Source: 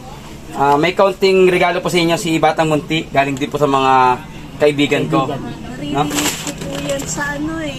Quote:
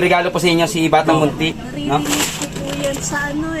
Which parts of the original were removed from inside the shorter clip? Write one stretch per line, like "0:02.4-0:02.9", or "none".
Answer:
0:03.0-0:05.5